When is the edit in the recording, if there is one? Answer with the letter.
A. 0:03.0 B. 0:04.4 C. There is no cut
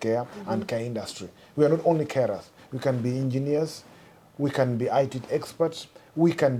C